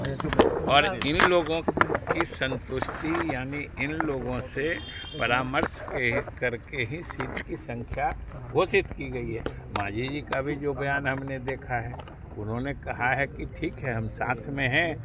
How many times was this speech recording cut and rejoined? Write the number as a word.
zero